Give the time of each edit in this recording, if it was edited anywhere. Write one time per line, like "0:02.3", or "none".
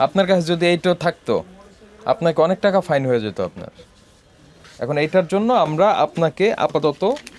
none